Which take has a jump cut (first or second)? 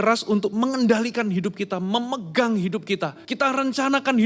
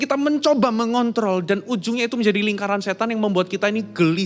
first